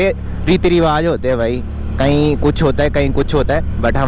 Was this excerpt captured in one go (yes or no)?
yes